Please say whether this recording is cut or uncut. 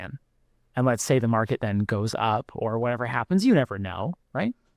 uncut